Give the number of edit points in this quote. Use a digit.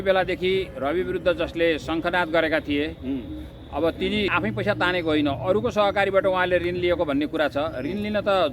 1